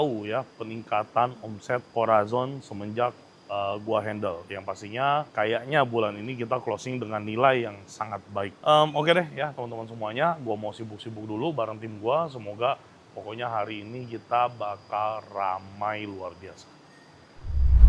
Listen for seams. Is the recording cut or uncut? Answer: uncut